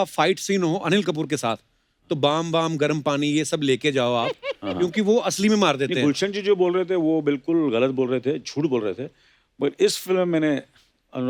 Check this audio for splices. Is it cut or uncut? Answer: uncut